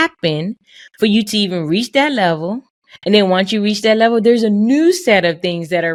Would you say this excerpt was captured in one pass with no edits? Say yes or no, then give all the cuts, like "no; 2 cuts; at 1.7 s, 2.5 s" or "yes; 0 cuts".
yes; 0 cuts